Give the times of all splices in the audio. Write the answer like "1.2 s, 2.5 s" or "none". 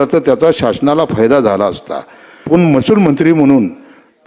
2.4 s